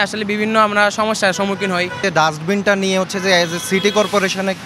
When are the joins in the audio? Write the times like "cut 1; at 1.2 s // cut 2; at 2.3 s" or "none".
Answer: cut 1; at 2.0 s